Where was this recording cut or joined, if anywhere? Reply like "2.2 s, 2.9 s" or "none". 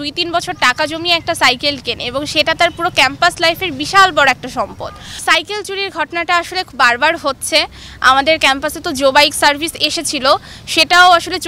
5.2 s